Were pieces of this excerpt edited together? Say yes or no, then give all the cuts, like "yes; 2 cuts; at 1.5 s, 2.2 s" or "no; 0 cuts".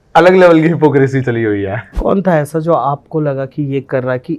yes; 1 cut; at 1.8 s